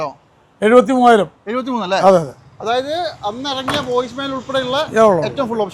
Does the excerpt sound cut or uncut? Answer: uncut